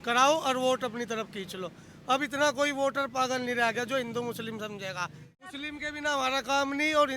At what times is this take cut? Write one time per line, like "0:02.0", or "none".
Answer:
0:05.5